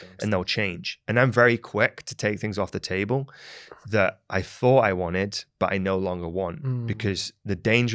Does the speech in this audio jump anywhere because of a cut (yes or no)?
no